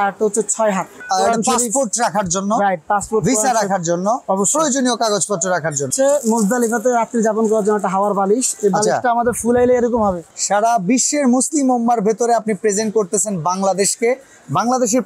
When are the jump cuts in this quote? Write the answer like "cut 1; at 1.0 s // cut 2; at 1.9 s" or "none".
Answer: cut 1; at 0.9 s // cut 2; at 5.9 s // cut 3; at 10.3 s